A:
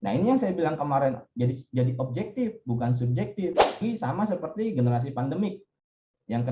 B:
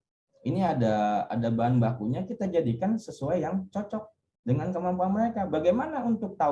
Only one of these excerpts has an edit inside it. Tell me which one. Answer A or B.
A